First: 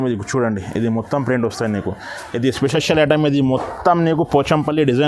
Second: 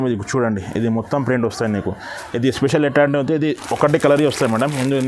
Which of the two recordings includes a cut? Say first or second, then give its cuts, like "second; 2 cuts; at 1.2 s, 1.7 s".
first; 1 cut; at 2.7 s